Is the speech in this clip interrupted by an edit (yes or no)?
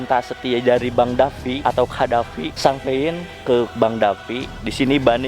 yes